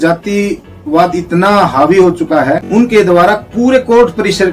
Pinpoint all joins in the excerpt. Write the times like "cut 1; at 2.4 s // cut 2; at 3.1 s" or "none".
cut 1; at 2.6 s